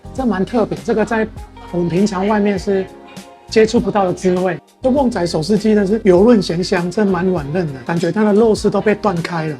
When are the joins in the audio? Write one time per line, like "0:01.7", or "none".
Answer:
0:04.7
0:07.8